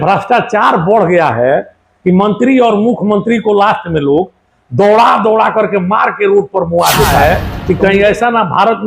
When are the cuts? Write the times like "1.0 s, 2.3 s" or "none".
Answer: 7.2 s